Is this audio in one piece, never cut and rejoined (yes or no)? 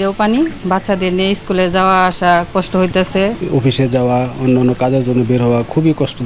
no